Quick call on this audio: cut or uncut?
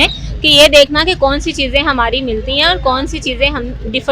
uncut